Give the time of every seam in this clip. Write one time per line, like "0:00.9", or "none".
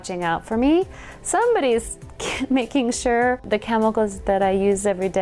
0:03.4